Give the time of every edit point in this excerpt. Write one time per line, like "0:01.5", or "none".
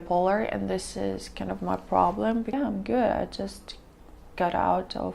0:02.5